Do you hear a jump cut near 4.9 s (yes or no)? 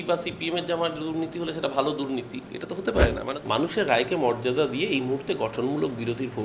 no